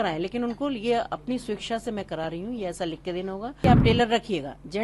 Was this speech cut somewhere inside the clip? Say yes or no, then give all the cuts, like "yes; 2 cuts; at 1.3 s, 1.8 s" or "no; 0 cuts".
yes; 1 cut; at 3.6 s